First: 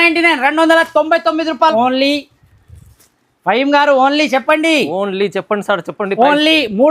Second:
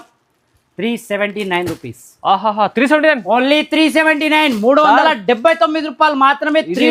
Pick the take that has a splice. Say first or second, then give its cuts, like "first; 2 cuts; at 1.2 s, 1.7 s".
first; 1 cut; at 1.7 s